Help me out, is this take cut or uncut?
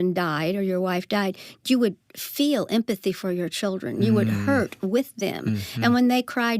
uncut